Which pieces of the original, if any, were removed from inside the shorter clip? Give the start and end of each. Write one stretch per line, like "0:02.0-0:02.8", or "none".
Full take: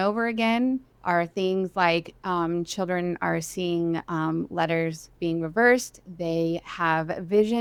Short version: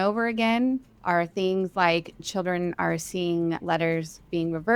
0:02.2-0:02.7
0:04.0-0:04.5